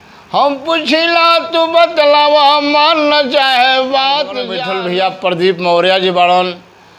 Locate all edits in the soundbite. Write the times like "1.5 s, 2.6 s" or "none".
4.6 s